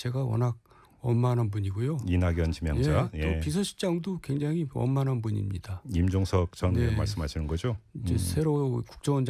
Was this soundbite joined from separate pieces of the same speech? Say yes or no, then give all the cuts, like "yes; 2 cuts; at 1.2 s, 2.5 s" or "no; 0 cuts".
no; 0 cuts